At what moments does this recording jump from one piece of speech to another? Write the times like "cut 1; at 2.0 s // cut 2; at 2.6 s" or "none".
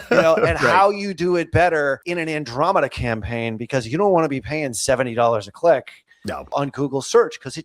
cut 1; at 2.0 s // cut 2; at 6.5 s